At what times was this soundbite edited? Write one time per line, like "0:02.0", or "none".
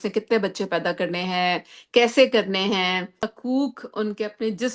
0:03.3